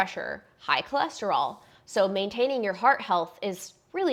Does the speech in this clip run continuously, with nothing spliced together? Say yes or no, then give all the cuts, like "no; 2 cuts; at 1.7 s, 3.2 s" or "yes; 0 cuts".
yes; 0 cuts